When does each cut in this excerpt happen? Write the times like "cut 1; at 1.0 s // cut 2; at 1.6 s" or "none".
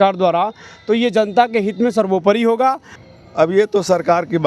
cut 1; at 2.9 s